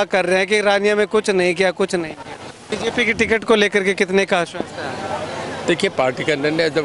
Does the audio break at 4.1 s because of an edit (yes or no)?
no